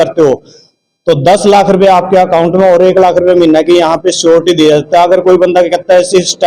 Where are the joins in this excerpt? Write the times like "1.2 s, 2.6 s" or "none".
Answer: none

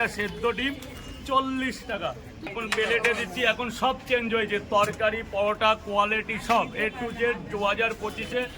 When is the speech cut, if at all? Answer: 2.5 s

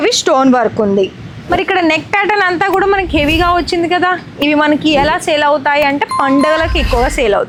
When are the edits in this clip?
none

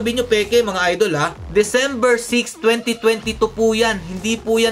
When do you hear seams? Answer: none

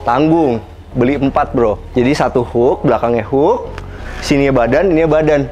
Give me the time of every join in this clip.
1.8 s

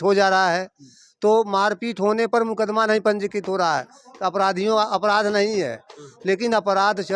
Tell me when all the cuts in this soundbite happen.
none

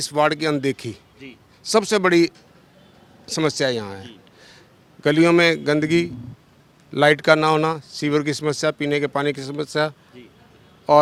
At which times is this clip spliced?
none

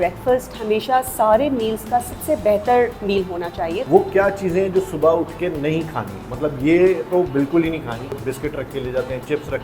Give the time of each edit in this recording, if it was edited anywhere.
3.8 s, 8.2 s

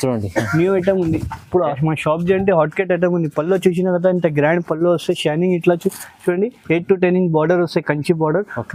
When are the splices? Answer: none

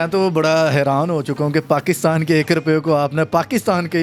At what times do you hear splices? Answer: none

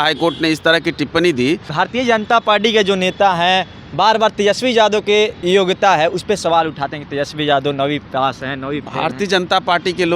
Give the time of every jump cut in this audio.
1.7 s, 5.4 s

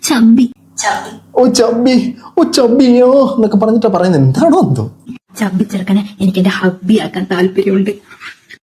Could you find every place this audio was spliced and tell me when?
none

